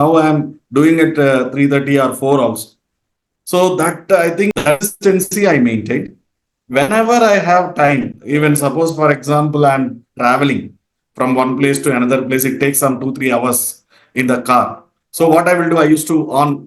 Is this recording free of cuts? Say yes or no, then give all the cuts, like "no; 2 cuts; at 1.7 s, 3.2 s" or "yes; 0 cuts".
no; 1 cut; at 4.5 s